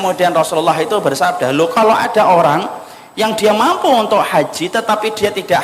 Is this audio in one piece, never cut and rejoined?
yes; 0 cuts

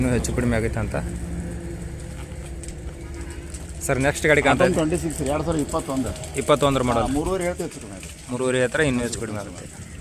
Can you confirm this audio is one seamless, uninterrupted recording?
yes; 0 cuts

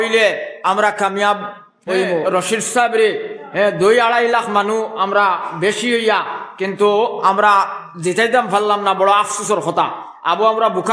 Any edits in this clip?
yes; 1 cut; at 2.2 s

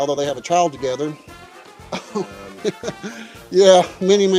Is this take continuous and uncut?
yes; 0 cuts

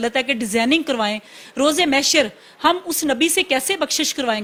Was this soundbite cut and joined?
no; 0 cuts

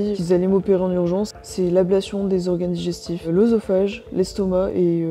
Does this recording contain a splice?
yes; 1 cut; at 1.4 s

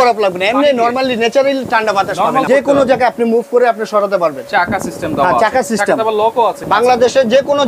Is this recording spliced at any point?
yes; 2 cuts; at 2.4 s, 6.6 s

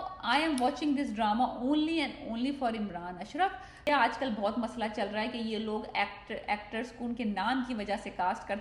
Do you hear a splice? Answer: yes; 1 cut; at 3.9 s

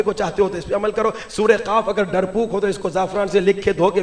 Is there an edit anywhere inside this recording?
no; 0 cuts

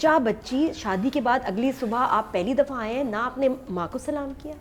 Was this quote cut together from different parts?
no; 0 cuts

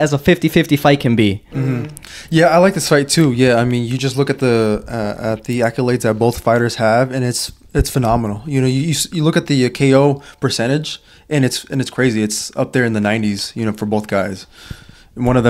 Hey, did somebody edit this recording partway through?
no; 0 cuts

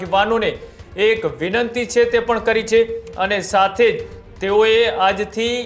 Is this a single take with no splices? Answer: yes; 0 cuts

